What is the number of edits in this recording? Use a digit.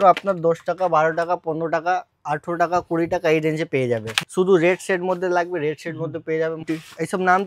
2